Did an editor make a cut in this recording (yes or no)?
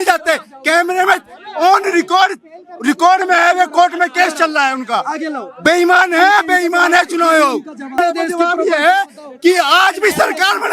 yes